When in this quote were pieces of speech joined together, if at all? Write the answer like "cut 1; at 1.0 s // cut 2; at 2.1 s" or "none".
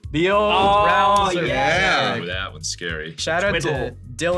none